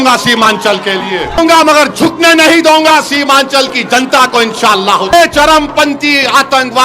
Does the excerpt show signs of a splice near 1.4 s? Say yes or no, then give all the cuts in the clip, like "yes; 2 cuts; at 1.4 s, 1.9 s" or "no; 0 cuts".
yes; 2 cuts; at 1.4 s, 5.1 s